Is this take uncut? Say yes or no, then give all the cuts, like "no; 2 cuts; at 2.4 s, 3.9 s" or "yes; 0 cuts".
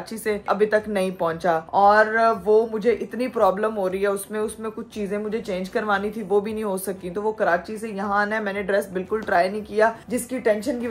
yes; 0 cuts